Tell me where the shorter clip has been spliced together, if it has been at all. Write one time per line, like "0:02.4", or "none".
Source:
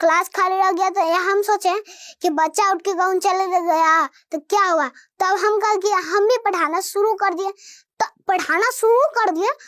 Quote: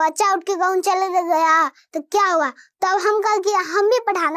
none